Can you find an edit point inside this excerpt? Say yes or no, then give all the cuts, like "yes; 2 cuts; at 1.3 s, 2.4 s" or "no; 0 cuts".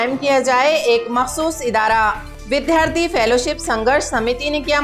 no; 0 cuts